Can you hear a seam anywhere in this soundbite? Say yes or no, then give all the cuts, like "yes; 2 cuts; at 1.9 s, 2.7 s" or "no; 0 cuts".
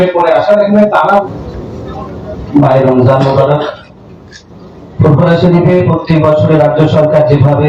yes; 1 cut; at 1.2 s